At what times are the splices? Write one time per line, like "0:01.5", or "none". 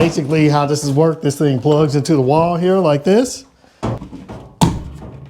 0:04.1